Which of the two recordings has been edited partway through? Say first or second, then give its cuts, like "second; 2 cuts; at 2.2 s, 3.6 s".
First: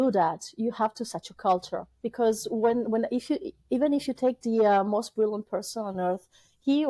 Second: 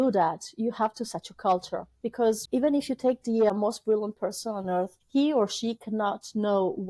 second; 3 cuts; at 2.4 s, 3.5 s, 5.0 s